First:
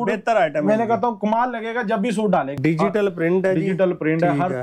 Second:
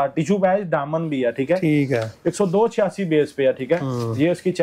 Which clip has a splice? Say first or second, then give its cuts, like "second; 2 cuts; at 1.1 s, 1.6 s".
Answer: first; 1 cut; at 2.5 s